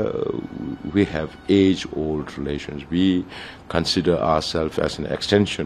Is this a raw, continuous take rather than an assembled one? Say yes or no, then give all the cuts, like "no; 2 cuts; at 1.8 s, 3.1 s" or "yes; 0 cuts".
yes; 0 cuts